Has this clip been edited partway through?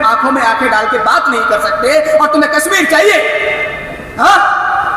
no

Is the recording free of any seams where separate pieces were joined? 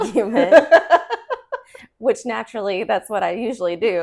yes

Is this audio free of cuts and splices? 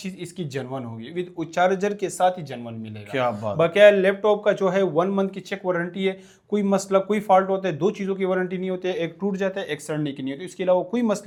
yes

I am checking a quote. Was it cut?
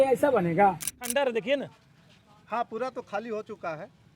yes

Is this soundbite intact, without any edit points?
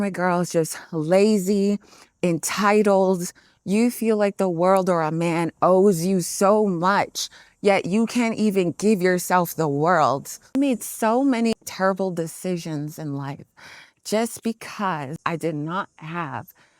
no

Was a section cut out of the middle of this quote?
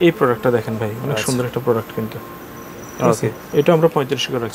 no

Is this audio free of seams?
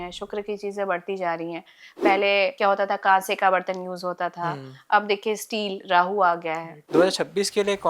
no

